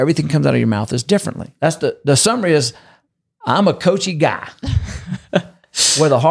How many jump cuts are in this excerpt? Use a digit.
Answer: 1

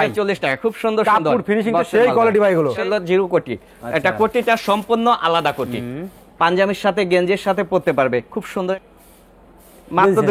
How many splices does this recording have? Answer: 2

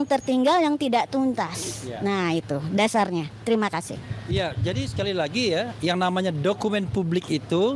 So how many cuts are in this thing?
0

